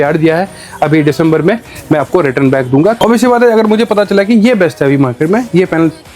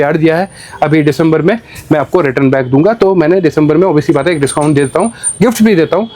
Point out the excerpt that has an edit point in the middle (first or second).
first